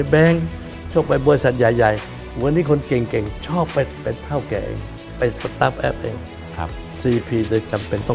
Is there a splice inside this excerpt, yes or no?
yes